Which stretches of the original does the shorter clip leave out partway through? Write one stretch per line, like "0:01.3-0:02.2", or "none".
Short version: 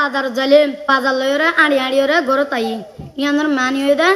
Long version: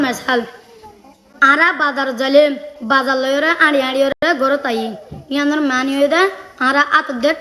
0:02.6-0:02.8
0:04.1-0:04.2